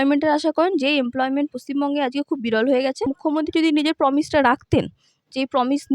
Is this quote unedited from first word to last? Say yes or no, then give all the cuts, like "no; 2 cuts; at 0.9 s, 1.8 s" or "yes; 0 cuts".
no; 1 cut; at 3.1 s